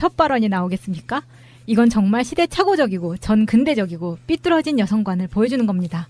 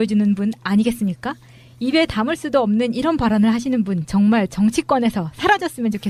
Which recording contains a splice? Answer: first; 1 cut; at 4.2 s

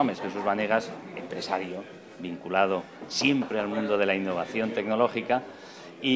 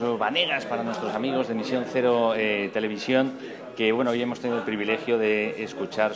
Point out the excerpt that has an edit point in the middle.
second; 1 cut; at 2.0 s

